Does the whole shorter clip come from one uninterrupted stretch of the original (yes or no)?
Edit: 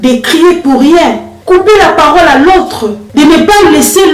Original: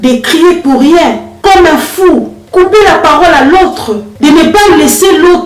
no